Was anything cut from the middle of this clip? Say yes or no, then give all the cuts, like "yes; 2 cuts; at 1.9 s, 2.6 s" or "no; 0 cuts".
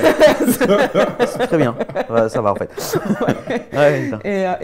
no; 0 cuts